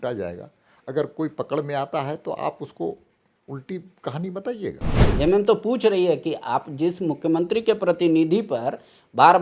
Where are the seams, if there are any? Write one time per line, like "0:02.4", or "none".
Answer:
0:05.0